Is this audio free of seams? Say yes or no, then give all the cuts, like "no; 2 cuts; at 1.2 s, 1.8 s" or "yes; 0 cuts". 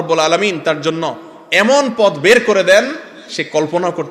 yes; 0 cuts